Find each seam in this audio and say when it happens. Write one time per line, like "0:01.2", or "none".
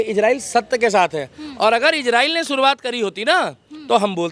none